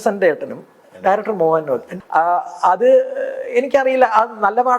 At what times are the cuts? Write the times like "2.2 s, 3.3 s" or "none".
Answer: 1.9 s